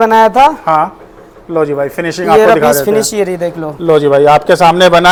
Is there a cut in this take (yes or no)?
no